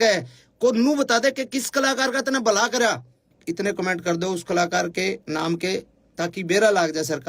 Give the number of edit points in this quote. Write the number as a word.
one